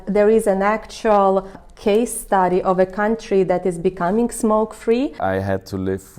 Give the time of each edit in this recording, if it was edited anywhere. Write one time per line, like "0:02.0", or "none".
0:01.6
0:05.2